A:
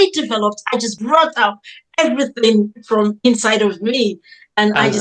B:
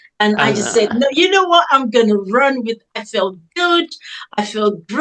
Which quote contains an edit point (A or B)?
A